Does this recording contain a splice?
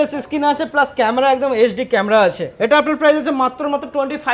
yes; 1 cut; at 2.5 s

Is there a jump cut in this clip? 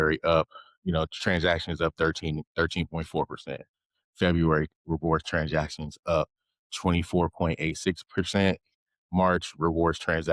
no; 0 cuts

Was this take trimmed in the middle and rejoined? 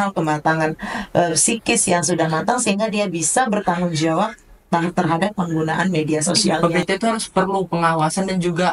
yes; 1 cut; at 6.6 s

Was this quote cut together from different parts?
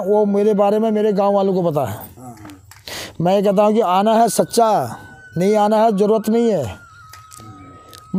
no; 0 cuts

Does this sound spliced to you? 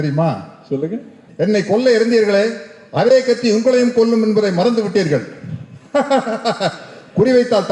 yes; 1 cut; at 1.2 s

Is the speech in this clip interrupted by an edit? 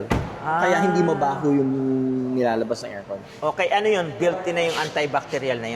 no; 0 cuts

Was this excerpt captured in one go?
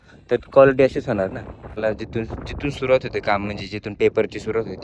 no; 1 cut; at 1.8 s

